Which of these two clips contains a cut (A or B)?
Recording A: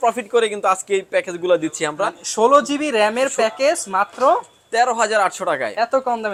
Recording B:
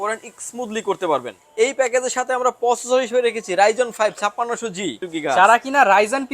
B